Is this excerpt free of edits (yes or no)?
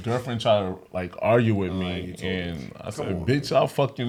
yes